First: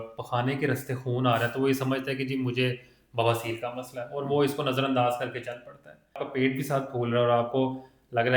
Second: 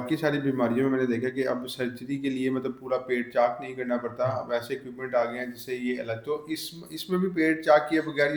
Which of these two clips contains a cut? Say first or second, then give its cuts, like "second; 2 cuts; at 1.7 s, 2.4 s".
first; 1 cut; at 6.2 s